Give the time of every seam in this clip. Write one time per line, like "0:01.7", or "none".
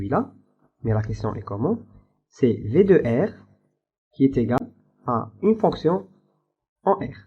0:04.6